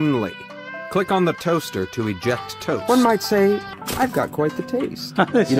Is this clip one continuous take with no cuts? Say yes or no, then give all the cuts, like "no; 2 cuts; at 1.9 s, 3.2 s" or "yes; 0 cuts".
no; 1 cut; at 2.8 s